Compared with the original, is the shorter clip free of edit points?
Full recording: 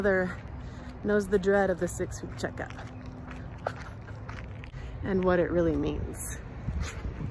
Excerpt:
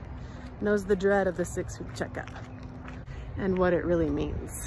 no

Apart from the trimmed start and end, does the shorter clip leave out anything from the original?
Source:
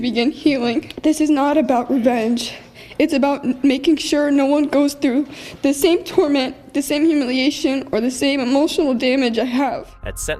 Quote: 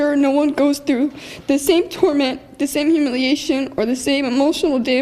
no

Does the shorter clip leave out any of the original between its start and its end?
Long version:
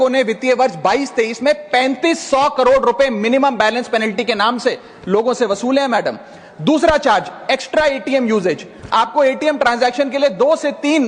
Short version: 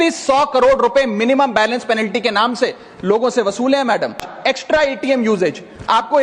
yes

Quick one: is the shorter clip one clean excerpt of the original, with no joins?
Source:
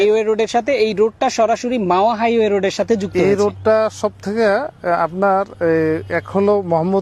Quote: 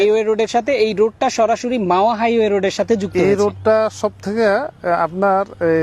yes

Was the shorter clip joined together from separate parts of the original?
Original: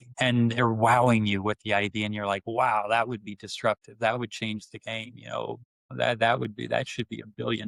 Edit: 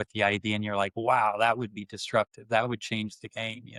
no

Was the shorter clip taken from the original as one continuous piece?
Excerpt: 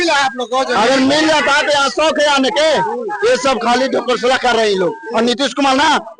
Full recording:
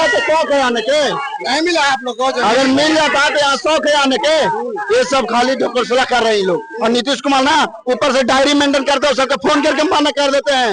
yes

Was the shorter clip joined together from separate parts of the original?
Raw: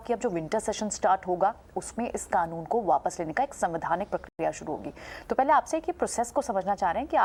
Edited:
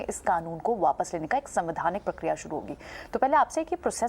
yes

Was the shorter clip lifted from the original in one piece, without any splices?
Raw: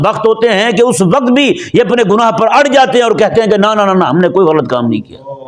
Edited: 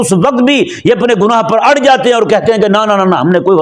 yes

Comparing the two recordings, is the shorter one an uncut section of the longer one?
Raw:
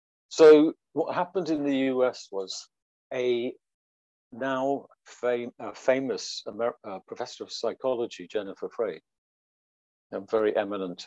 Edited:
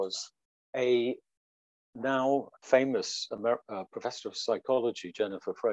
no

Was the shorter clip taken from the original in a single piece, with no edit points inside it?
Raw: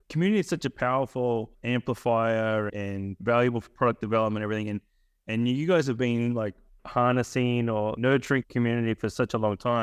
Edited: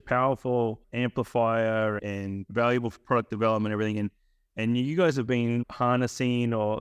no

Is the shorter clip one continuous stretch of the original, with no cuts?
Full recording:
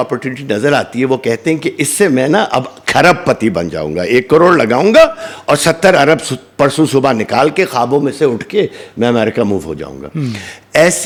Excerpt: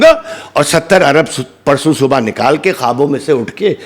yes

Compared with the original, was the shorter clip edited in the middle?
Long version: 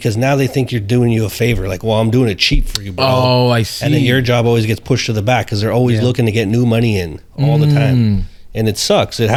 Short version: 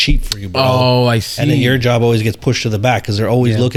no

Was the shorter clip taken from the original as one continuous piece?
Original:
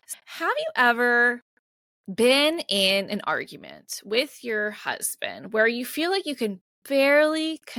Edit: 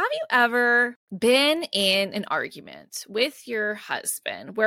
no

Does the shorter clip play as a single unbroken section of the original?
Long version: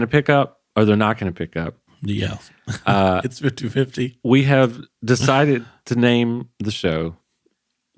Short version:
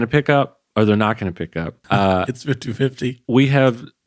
no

